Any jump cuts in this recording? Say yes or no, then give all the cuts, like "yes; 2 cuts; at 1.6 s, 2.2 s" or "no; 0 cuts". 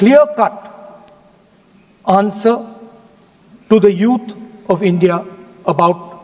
no; 0 cuts